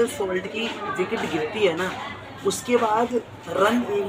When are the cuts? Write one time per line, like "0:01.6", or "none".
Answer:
none